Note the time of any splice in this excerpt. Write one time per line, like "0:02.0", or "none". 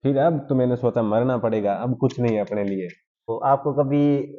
0:03.2

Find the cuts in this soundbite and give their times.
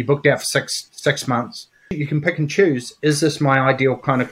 0:02.0

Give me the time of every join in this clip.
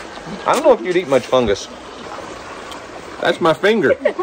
0:02.0

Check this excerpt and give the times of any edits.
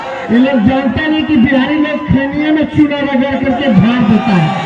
none

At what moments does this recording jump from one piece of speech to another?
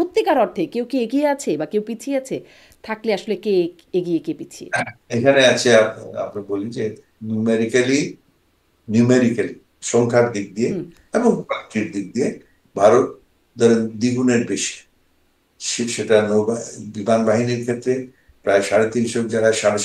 none

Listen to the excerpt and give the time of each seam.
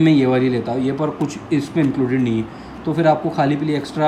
none

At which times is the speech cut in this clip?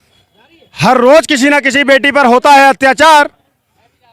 none

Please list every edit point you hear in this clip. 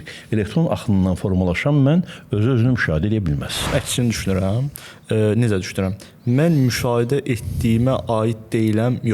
0:03.7

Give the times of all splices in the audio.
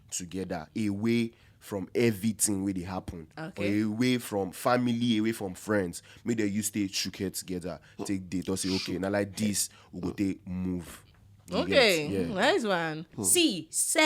0:13.1

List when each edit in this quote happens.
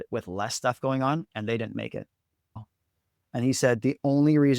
0:02.6

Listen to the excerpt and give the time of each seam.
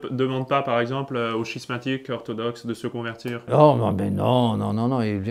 0:03.4

